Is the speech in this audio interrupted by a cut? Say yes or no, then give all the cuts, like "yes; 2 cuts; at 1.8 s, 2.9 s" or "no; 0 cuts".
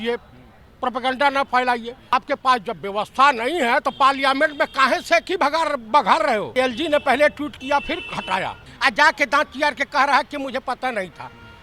yes; 3 cuts; at 2.1 s, 6.5 s, 8.7 s